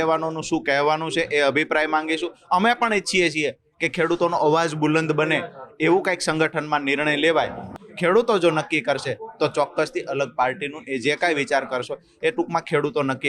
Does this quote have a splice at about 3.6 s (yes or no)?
no